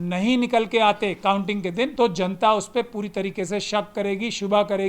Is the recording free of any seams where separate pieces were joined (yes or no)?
no